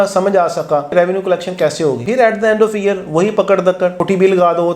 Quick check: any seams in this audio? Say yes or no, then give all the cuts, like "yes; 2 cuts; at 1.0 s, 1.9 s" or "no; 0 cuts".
yes; 2 cuts; at 0.9 s, 2.0 s